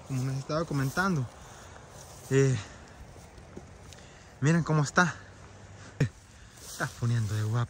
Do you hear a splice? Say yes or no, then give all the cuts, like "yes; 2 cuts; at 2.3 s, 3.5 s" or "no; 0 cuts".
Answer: yes; 1 cut; at 6.0 s